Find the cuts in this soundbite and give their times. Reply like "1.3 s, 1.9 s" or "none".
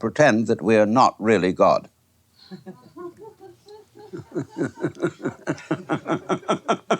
3.4 s